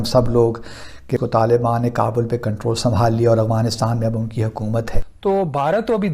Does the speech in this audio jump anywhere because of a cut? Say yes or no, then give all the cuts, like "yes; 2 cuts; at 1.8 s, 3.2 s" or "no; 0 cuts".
yes; 2 cuts; at 1.1 s, 5.0 s